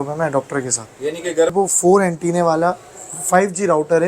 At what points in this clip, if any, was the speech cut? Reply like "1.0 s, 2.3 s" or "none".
1.5 s

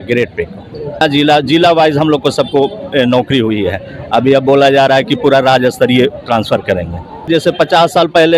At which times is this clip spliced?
1.0 s, 7.3 s

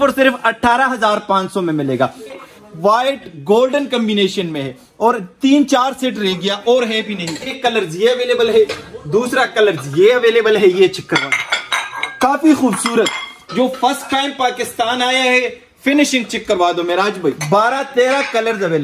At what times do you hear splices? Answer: 2.3 s, 7.5 s, 17.4 s

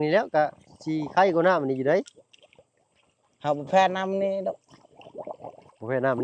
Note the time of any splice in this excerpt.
none

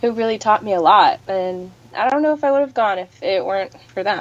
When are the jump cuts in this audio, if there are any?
none

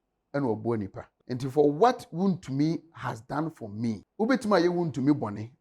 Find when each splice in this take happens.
1.1 s, 4.1 s

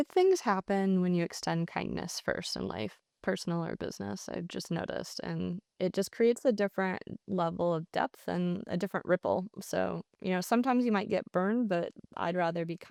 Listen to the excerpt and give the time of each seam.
none

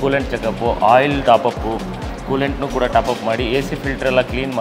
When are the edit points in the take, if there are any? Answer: none

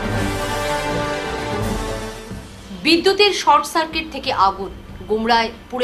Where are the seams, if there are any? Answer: 1.8 s

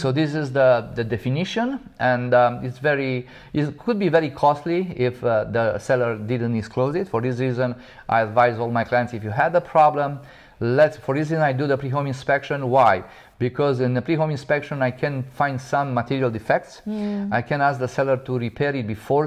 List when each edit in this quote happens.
none

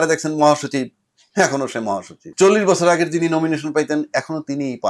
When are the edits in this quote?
2.2 s

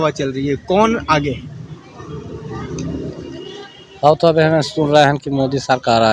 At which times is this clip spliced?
none

